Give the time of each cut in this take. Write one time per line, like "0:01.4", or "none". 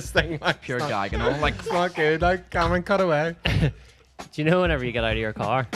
none